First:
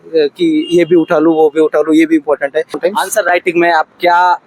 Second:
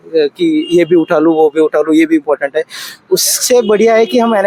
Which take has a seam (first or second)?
first